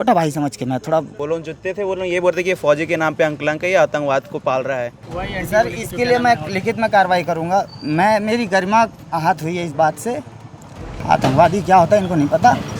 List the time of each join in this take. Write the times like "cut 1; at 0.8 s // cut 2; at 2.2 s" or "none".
cut 1; at 1.1 s // cut 2; at 5.0 s // cut 3; at 10.9 s